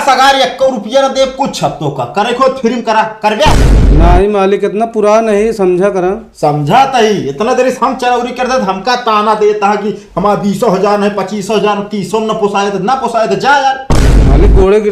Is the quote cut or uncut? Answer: uncut